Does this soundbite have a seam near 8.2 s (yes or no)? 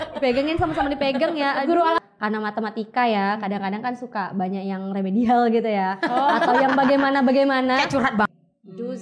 yes